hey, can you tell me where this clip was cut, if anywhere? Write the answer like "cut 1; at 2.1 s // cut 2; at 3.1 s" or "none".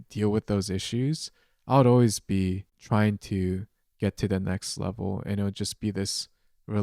cut 1; at 2.7 s